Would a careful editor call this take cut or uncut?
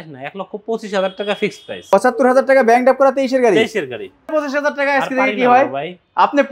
cut